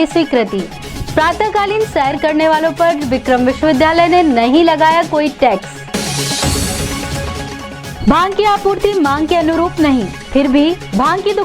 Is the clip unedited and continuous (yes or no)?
no